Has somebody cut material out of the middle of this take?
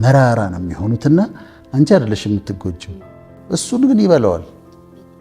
yes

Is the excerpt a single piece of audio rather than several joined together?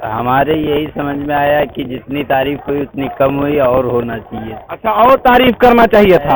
yes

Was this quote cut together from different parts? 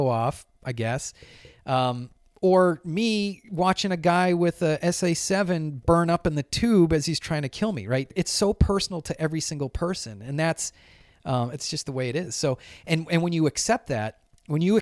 yes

